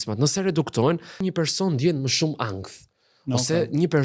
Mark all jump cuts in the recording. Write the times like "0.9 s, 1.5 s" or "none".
1.3 s